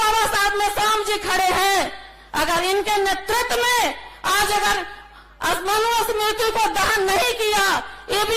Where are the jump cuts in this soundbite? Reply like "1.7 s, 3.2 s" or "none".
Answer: none